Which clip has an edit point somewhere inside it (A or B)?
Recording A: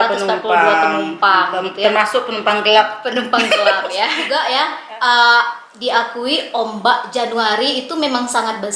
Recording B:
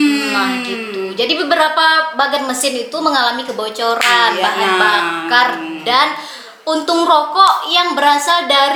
A